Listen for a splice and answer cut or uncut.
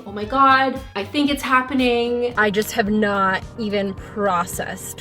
cut